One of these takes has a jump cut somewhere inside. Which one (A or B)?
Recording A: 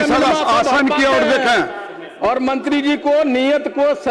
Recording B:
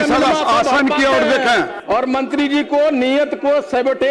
B